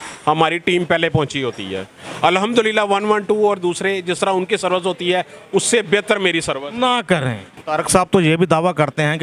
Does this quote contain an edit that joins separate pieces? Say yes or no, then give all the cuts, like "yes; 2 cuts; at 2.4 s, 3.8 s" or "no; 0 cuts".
yes; 1 cut; at 7.7 s